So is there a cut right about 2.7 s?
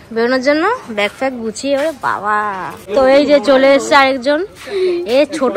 yes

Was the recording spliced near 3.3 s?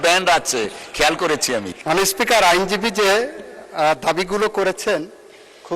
no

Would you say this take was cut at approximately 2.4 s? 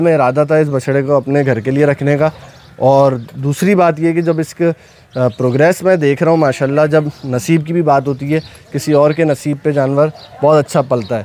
no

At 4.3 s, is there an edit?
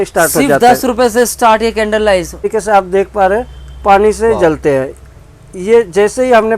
no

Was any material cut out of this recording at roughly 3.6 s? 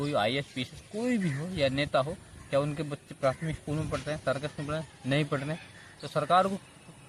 no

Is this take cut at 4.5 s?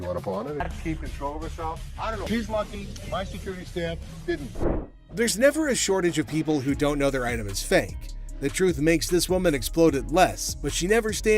yes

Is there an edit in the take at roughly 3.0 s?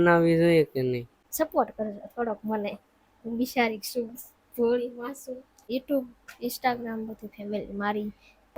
no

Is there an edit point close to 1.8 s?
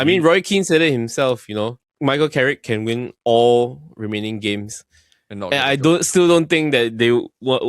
yes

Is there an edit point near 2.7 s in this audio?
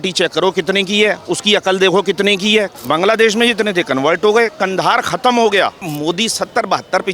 yes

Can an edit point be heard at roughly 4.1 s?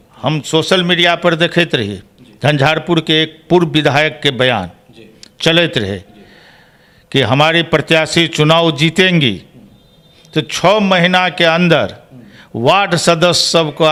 no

